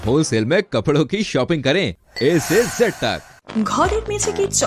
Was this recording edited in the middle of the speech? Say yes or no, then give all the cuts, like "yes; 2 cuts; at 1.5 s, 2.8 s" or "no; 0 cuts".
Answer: yes; 1 cut; at 3.3 s